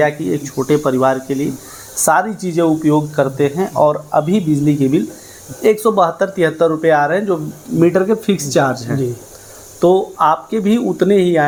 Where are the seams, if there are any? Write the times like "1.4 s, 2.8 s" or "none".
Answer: none